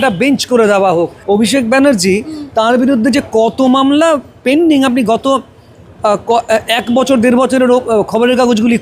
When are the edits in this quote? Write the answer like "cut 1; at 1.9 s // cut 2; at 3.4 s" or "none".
cut 1; at 1.1 s